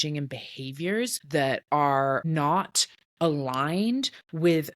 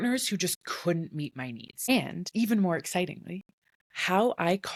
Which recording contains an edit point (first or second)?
first